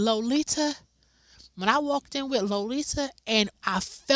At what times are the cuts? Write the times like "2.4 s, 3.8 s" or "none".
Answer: none